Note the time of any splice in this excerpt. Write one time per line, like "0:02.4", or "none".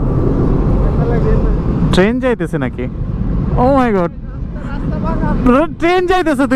none